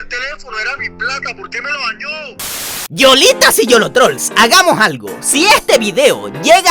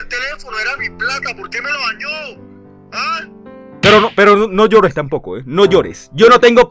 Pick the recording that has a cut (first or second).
first